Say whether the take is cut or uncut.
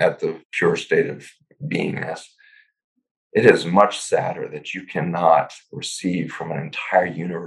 uncut